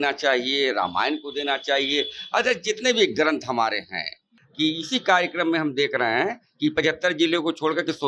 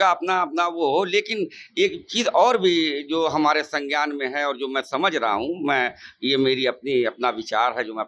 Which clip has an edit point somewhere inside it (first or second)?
first